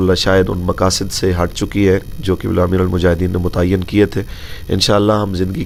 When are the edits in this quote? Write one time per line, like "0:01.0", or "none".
none